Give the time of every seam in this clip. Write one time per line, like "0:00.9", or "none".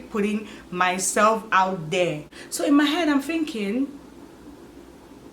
0:02.3